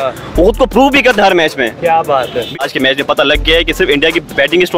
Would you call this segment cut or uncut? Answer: cut